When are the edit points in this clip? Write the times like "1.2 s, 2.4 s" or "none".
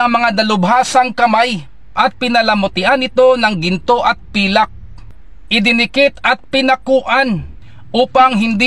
4.9 s